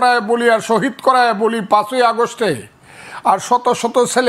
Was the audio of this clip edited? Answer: no; 0 cuts

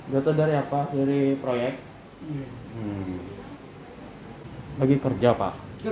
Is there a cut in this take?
yes; 1 cut; at 4.4 s

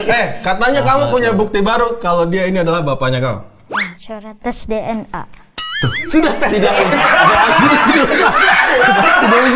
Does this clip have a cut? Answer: no; 0 cuts

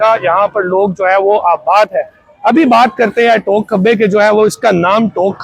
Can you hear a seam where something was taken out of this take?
no; 0 cuts

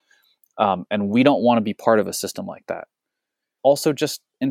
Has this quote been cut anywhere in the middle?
yes; 1 cut; at 3.5 s

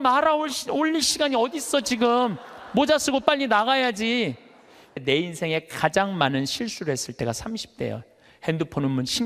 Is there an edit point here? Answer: yes; 1 cut; at 5.0 s

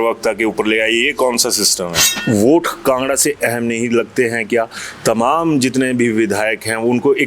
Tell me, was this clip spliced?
yes; 1 cut; at 2.1 s

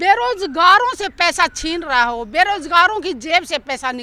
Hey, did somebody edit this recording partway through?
no; 0 cuts

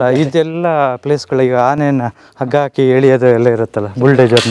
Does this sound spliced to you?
no; 0 cuts

